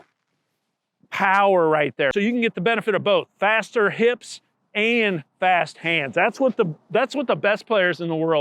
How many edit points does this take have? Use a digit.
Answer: 1